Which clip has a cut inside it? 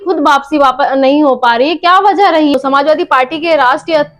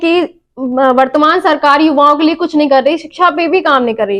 first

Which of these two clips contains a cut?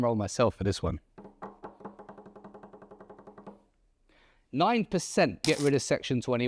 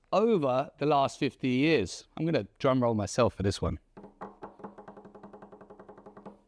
first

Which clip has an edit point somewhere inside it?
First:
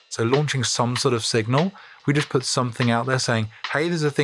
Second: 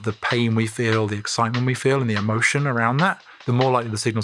second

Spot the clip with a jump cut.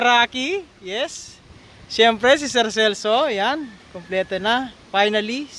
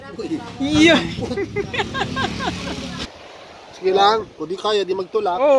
second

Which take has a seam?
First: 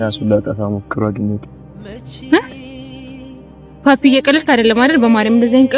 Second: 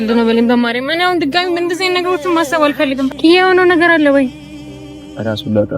second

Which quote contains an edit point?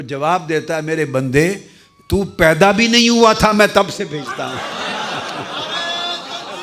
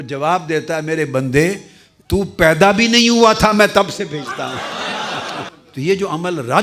second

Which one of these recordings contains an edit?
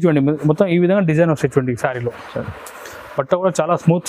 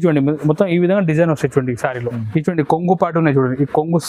second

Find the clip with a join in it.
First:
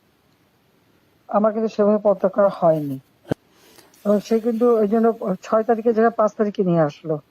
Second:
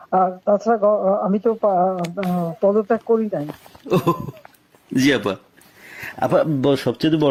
first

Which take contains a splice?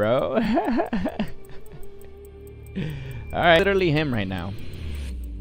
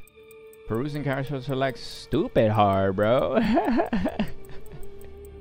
first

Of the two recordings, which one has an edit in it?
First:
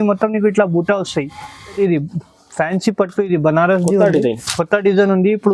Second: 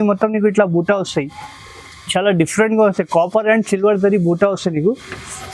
first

